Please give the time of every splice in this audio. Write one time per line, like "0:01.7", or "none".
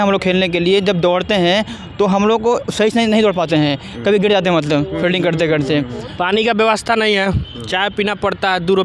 0:06.0